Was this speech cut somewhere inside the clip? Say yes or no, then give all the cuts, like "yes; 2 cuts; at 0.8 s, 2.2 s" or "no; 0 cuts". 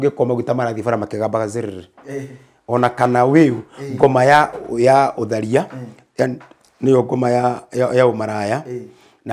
no; 0 cuts